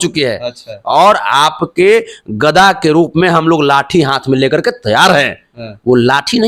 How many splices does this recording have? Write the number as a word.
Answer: zero